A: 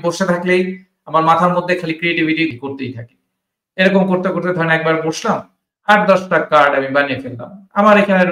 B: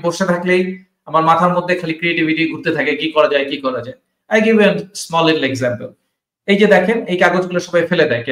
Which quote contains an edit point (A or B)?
A